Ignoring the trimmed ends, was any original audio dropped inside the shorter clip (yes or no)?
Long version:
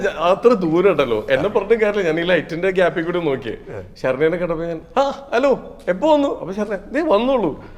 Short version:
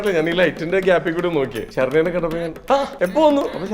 yes